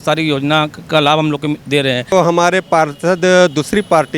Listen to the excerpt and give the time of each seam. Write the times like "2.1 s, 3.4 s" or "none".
2.1 s